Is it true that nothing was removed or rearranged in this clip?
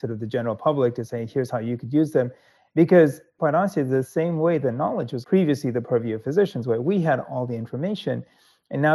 no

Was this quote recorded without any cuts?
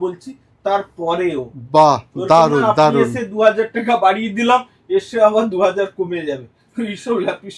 yes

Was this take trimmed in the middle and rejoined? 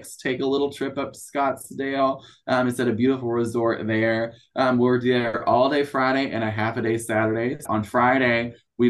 yes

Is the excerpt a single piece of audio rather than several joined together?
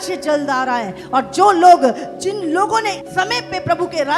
no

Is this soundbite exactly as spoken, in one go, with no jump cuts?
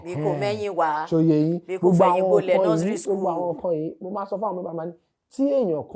yes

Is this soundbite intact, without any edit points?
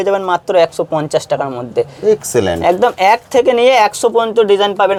yes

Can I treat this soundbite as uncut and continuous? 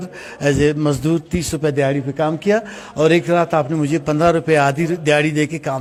yes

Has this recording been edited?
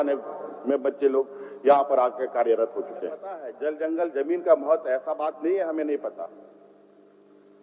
yes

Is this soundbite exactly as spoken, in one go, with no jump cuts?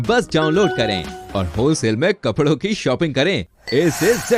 yes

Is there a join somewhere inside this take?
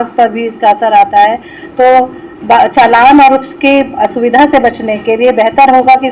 no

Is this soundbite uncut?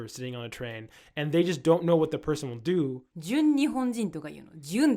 no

